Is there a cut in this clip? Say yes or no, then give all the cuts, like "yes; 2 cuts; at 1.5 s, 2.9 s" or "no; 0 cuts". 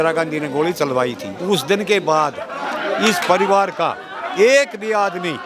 yes; 1 cut; at 1.3 s